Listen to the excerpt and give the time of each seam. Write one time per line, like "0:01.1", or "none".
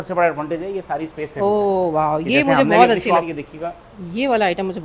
0:03.3